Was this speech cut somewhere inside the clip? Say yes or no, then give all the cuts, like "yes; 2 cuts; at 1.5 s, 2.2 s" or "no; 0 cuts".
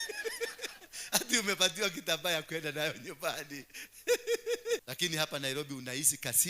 yes; 1 cut; at 4.9 s